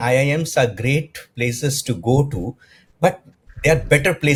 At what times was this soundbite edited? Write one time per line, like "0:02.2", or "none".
none